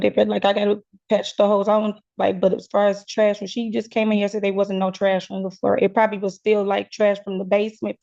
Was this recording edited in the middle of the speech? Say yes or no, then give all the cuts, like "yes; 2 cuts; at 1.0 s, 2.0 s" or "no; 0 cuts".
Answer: no; 0 cuts